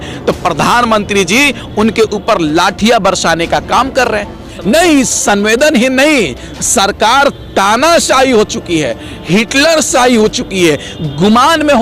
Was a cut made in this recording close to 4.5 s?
yes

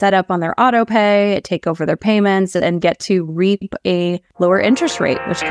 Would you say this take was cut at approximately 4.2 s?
yes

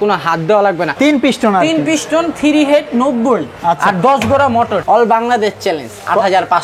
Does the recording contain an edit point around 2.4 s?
no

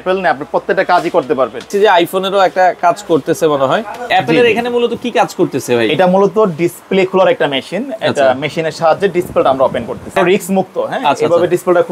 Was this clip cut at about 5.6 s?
no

